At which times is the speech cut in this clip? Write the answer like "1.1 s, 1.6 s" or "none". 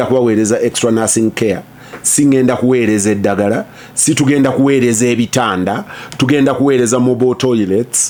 none